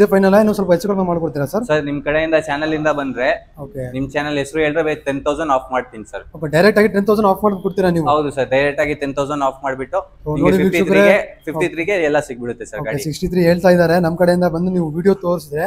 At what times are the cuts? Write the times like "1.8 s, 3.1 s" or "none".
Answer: none